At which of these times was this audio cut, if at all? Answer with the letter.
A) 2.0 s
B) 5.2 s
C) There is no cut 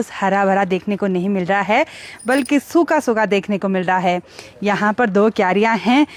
C